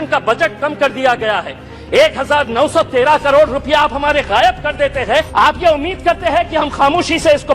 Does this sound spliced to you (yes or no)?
yes